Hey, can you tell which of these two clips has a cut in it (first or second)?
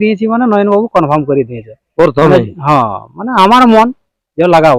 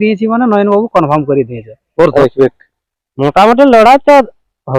second